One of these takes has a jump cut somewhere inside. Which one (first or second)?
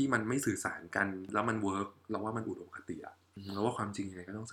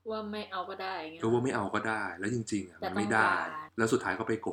second